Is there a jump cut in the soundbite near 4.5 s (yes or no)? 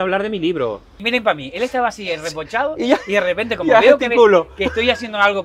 no